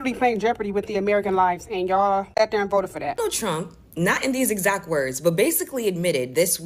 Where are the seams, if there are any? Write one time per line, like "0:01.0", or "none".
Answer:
0:03.2